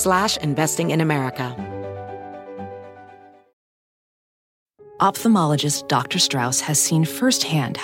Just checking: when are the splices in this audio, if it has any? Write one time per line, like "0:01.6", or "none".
0:01.5